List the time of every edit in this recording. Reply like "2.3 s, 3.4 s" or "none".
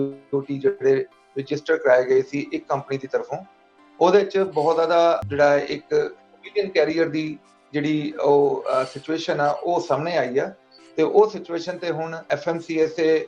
5.2 s, 12.2 s

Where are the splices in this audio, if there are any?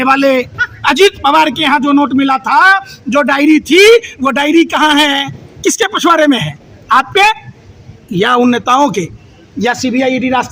none

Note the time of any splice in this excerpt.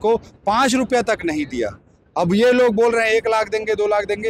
none

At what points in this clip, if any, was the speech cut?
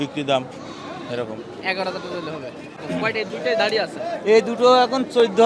2.7 s

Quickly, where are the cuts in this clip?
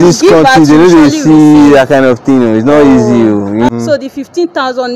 3.7 s

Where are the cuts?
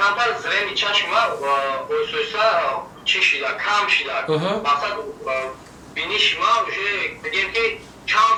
none

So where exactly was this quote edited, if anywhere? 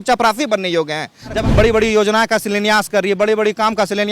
1.4 s

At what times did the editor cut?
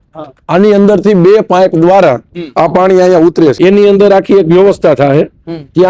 3.5 s

